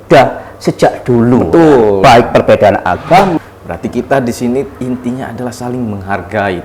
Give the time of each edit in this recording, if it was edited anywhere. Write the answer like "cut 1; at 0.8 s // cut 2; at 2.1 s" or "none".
cut 1; at 3.4 s